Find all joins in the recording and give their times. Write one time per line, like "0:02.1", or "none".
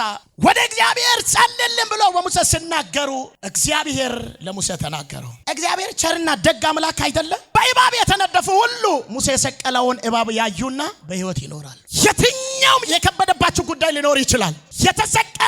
0:05.3
0:11.8